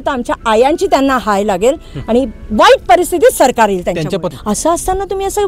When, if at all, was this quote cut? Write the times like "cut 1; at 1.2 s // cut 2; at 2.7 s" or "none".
cut 1; at 4.2 s